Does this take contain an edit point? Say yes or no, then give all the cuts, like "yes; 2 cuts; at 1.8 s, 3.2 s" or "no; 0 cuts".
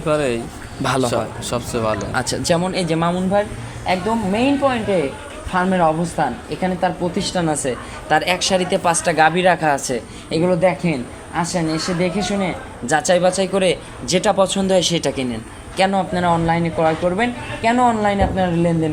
no; 0 cuts